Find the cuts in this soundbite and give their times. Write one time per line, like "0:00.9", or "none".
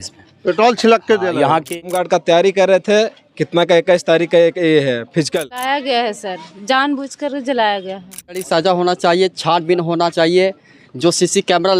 0:01.9
0:05.6
0:08.4